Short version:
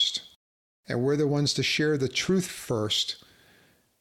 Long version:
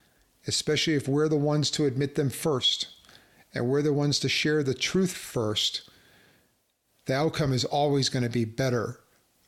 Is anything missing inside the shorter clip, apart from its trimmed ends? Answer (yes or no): no